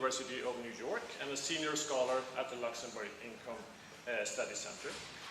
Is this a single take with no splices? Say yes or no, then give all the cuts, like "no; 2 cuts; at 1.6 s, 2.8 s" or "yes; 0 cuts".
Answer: yes; 0 cuts